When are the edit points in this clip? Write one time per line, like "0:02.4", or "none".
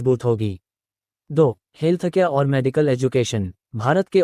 none

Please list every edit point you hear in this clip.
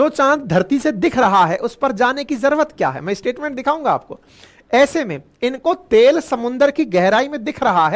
none

